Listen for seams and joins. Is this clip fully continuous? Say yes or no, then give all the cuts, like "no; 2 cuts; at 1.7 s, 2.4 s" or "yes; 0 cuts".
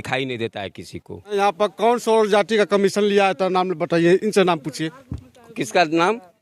no; 1 cut; at 1.3 s